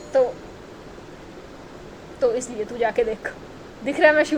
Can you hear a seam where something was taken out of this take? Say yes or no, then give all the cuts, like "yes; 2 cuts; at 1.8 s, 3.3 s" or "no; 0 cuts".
no; 0 cuts